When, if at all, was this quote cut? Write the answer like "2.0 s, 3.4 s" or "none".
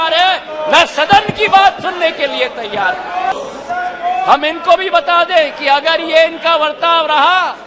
3.3 s

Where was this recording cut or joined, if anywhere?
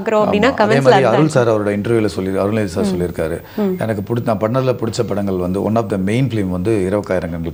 none

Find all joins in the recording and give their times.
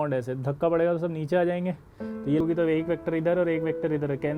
2.4 s

